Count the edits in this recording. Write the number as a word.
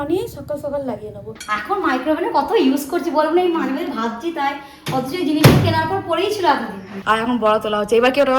two